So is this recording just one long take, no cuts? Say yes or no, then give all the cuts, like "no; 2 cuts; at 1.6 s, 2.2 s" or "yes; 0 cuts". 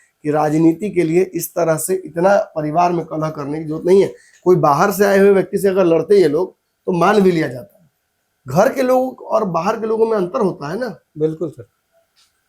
yes; 0 cuts